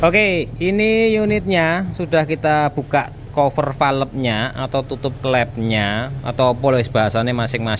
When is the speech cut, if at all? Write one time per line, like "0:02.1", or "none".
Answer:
none